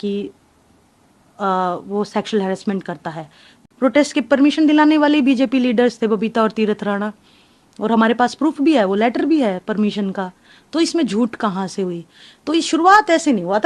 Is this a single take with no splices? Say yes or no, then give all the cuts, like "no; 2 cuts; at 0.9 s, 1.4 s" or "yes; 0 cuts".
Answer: no; 1 cut; at 3.6 s